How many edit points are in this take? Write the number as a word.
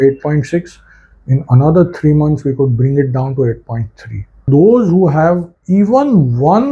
one